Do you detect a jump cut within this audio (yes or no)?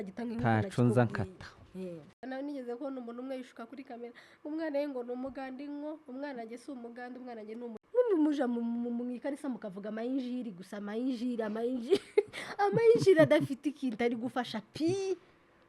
yes